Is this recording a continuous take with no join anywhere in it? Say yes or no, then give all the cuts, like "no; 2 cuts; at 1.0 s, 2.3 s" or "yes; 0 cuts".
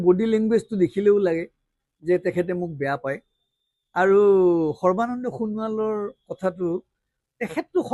yes; 0 cuts